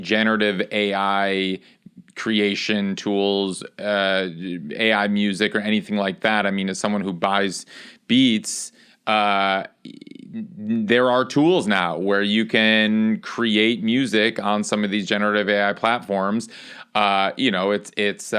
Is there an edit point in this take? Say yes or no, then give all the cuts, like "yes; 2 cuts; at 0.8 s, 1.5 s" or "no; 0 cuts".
no; 0 cuts